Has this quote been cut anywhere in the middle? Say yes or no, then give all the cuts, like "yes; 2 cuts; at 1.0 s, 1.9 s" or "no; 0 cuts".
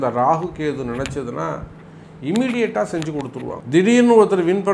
yes; 1 cut; at 3.6 s